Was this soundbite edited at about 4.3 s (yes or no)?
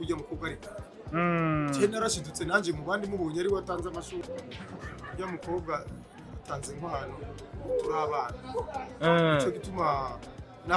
yes